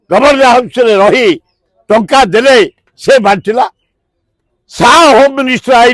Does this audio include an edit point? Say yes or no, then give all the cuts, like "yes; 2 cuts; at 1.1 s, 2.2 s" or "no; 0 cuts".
no; 0 cuts